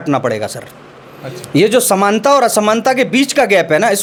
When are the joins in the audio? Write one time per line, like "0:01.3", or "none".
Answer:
none